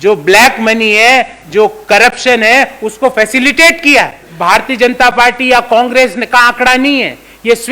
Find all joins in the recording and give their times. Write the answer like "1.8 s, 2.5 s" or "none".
4.2 s